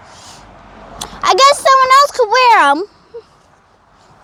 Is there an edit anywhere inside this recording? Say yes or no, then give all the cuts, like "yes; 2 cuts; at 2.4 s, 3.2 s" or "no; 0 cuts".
no; 0 cuts